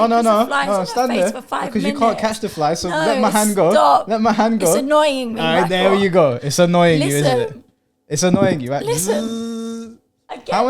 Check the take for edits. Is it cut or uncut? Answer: uncut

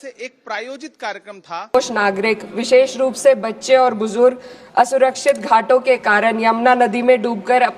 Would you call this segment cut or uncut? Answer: cut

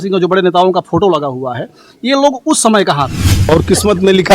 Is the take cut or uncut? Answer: cut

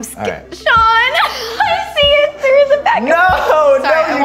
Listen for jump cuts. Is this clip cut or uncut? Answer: uncut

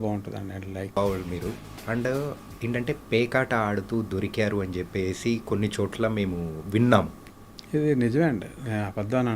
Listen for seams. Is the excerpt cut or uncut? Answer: cut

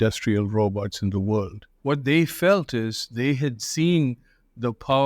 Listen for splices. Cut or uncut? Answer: cut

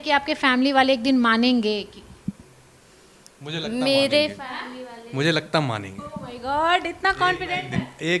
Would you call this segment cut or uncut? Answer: uncut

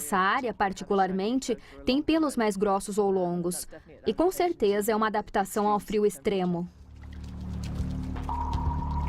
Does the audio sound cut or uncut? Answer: cut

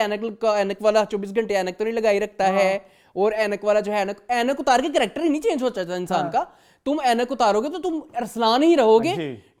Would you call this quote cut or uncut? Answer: uncut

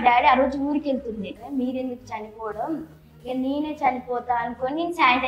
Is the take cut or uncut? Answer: cut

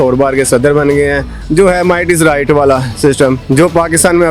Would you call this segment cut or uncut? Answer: cut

